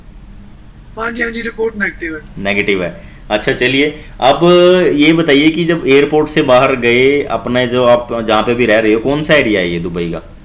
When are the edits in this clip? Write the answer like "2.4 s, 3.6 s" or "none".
none